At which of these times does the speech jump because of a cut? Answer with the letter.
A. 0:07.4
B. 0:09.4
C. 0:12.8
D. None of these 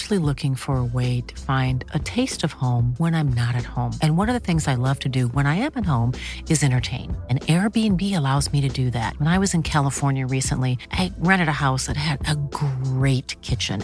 D